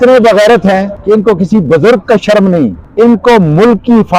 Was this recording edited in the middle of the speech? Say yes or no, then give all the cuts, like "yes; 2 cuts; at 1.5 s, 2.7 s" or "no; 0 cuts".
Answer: yes; 2 cuts; at 0.9 s, 2.8 s